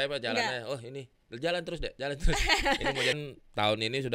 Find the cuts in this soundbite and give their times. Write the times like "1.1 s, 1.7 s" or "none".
3.2 s